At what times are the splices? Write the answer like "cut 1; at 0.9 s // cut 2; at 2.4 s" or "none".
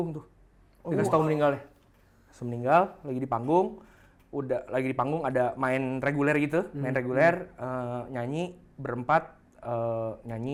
none